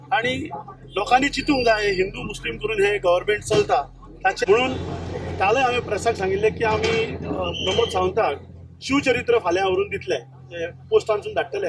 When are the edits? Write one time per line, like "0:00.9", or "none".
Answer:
0:04.4